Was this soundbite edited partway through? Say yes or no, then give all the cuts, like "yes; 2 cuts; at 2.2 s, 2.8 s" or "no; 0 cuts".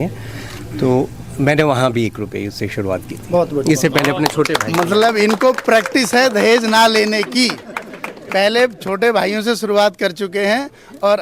no; 0 cuts